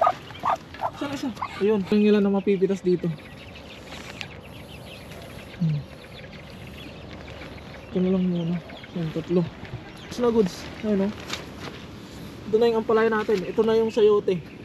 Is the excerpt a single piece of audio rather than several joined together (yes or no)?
no